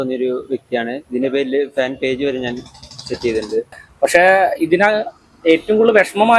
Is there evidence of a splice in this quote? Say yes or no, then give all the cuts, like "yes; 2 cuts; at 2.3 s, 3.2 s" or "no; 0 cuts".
yes; 1 cut; at 3.8 s